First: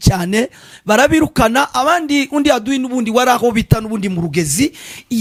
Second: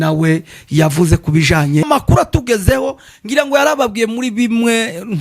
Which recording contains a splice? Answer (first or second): second